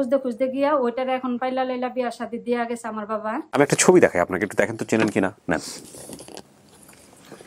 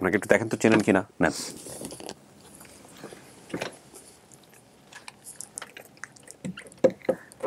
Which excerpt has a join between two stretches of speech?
first; 1 cut; at 3.4 s

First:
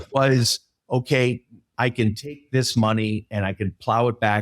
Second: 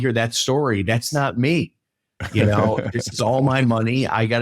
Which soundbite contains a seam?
first; 1 cut; at 1.7 s

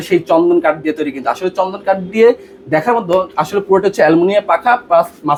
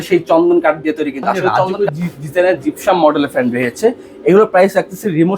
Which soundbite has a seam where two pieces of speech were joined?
second; 1 cut; at 1.7 s

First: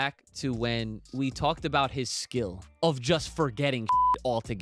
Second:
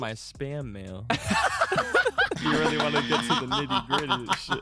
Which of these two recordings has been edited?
first; 2 cuts; at 1.1 s, 2.6 s

